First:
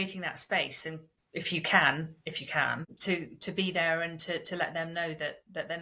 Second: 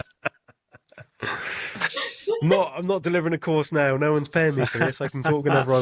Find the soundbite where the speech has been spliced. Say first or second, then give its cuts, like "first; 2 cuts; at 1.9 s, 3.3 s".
first; 2 cuts; at 1.1 s, 2.9 s